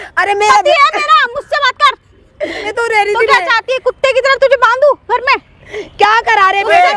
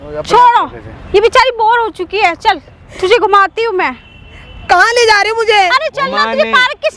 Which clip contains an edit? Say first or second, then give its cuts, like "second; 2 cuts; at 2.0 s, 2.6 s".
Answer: first; 1 cut; at 2.7 s